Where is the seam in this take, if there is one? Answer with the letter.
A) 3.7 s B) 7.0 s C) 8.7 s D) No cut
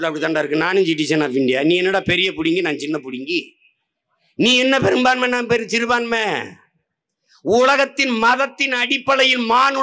D